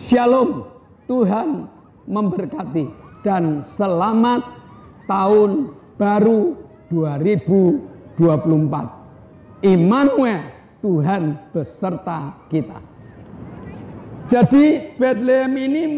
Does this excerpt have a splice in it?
yes; 1 cut; at 12.7 s

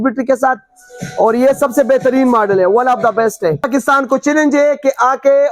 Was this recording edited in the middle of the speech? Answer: yes; 1 cut; at 3.7 s

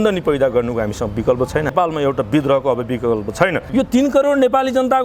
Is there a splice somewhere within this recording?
yes; 2 cuts; at 1.7 s, 3.6 s

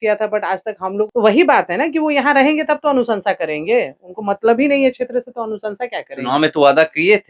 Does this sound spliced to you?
yes; 1 cut; at 1.0 s

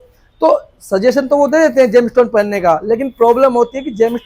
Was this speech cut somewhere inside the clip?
no; 0 cuts

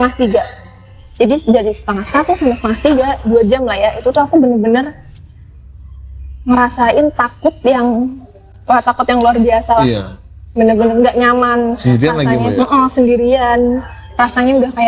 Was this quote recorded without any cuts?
yes; 0 cuts

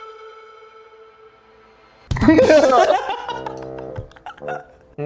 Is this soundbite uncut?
yes; 0 cuts

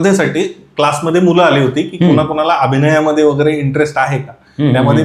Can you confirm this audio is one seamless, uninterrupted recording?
yes; 0 cuts

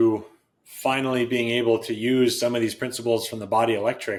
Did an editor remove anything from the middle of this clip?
no; 0 cuts

